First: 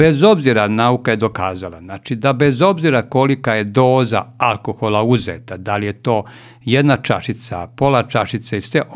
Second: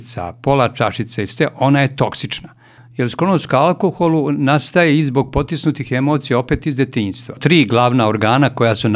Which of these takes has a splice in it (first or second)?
second